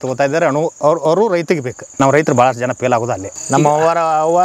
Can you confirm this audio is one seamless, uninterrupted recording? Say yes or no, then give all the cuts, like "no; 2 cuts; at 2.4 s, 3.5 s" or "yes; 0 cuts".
no; 2 cuts; at 1.8 s, 3.3 s